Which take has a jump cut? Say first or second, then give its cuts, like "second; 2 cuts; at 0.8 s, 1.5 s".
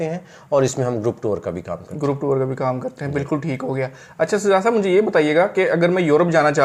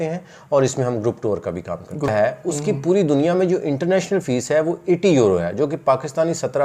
second; 1 cut; at 2.1 s